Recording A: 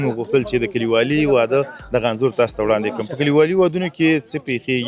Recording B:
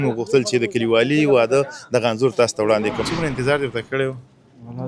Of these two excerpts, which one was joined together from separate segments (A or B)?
B